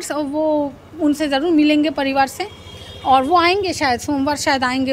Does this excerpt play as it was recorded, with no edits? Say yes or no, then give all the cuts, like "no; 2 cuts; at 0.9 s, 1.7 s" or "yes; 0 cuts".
yes; 0 cuts